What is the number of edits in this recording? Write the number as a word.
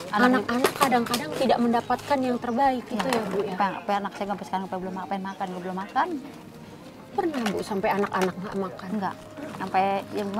zero